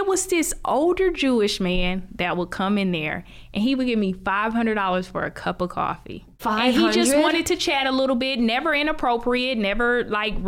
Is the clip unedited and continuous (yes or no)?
yes